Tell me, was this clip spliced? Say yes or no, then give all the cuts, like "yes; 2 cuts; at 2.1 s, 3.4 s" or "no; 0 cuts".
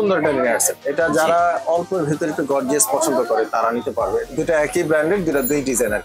yes; 1 cut; at 4.2 s